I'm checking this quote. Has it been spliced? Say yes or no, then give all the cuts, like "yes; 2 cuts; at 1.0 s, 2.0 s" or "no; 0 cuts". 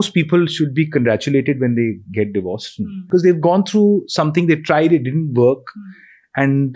yes; 1 cut; at 2.9 s